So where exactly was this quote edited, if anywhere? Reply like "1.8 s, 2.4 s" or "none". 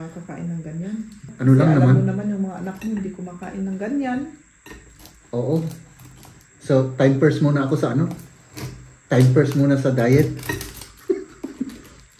1.3 s